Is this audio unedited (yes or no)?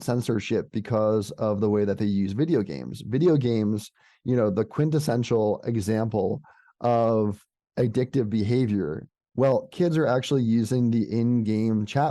no